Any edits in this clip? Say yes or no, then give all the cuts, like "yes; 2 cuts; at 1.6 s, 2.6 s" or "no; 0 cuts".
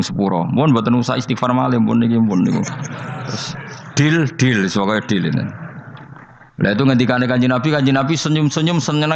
no; 0 cuts